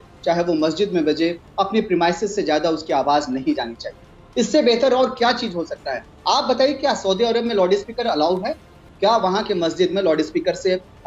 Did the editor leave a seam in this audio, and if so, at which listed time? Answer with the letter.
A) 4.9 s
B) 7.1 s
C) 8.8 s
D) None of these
C